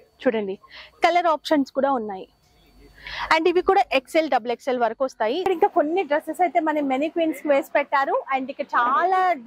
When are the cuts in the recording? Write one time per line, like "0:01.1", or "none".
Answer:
0:05.5